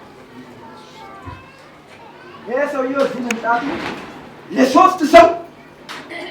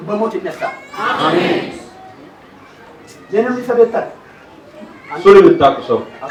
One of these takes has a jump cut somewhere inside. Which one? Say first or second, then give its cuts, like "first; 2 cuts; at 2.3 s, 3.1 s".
first; 1 cut; at 1.9 s